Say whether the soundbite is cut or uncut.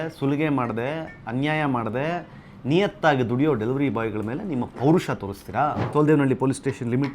cut